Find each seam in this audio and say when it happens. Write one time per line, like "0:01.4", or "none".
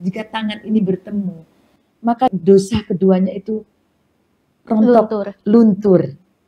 0:02.2